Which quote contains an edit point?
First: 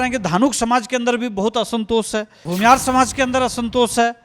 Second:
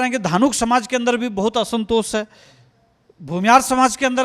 first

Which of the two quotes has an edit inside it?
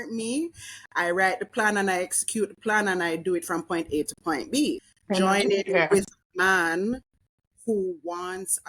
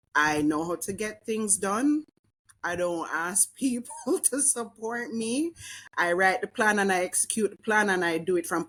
first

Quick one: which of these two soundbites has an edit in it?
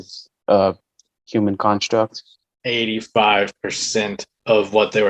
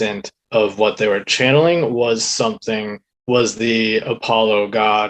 first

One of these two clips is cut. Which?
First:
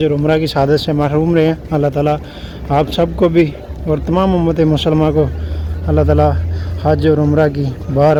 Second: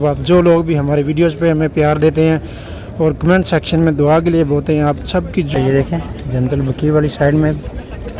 second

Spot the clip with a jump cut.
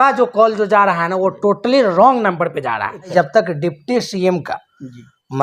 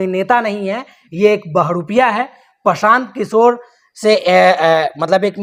first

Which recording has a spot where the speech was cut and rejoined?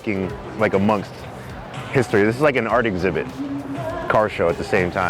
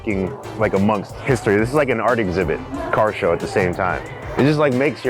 second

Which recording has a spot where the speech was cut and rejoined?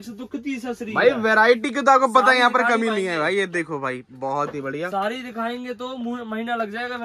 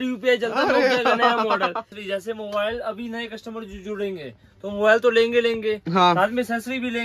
second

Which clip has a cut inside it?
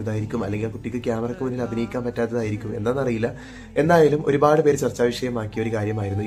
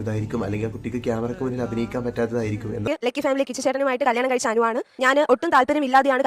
second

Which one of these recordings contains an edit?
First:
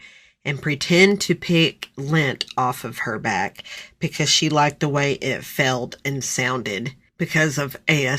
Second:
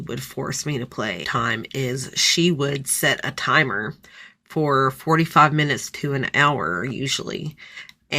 second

